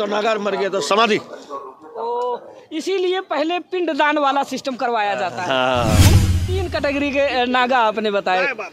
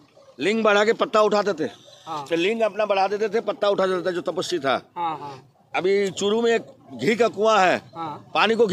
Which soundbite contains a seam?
first; 1 cut; at 6.1 s

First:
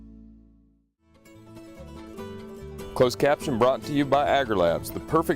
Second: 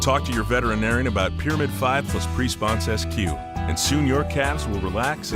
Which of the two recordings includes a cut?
first; 2 cuts; at 1.2 s, 2.5 s

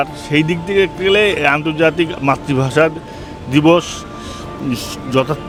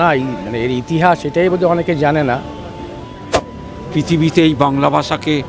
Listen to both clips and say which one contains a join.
second; 1 cut; at 3.5 s

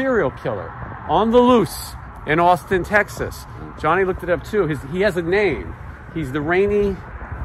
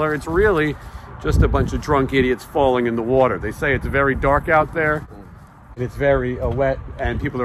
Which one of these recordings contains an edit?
second; 1 cut; at 5.8 s

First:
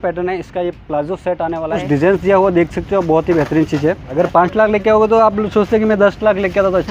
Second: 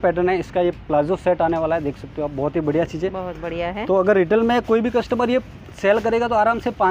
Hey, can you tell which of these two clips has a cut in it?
first; 2 cuts; at 1.8 s, 4.1 s

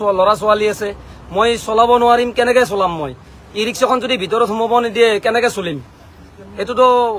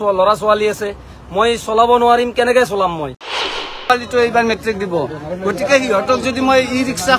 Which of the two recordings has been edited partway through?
second; 1 cut; at 3.6 s

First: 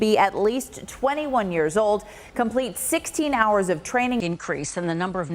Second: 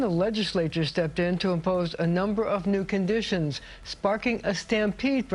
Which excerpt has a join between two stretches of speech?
first; 1 cut; at 4.3 s

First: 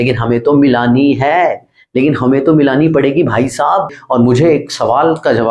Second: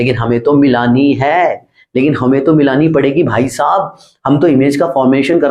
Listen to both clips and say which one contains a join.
first; 1 cut; at 4.0 s

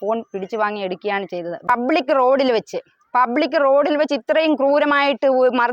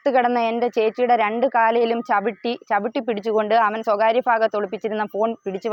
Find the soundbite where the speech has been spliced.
first; 1 cut; at 1.6 s

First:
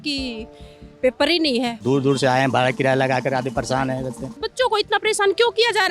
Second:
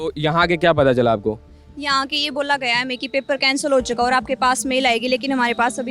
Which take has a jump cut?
first; 2 cuts; at 1.8 s, 4.5 s

